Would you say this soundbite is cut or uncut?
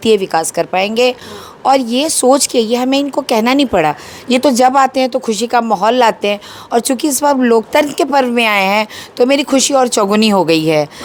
uncut